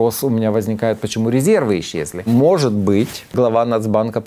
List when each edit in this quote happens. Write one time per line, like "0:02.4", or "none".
0:02.2
0:03.3